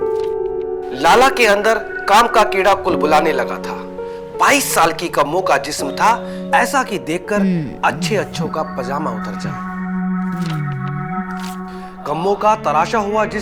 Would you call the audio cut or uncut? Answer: uncut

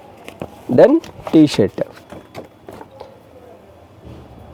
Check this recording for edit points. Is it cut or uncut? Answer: uncut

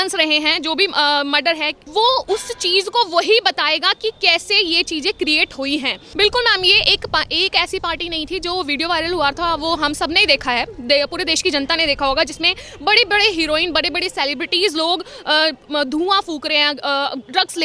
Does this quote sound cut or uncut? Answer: cut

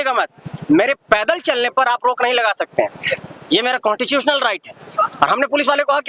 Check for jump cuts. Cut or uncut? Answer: uncut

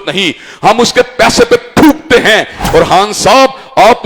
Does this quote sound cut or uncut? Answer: cut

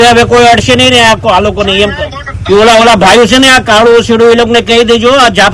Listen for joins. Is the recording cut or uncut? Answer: cut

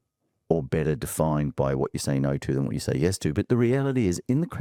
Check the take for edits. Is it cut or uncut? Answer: uncut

